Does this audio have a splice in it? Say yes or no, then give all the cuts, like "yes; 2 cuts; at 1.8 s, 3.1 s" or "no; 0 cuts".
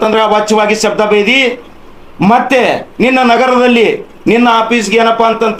no; 0 cuts